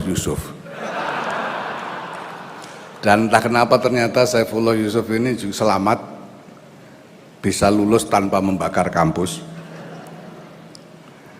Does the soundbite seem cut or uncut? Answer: cut